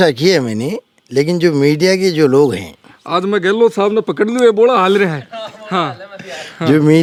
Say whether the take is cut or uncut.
uncut